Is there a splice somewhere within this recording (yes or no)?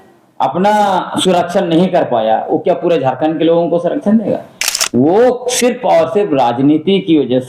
no